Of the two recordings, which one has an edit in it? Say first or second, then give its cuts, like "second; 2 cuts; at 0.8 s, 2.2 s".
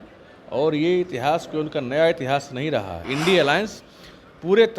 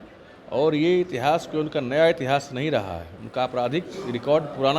first; 1 cut; at 3.1 s